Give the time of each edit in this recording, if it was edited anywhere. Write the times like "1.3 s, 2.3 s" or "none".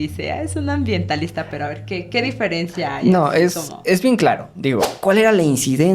4.9 s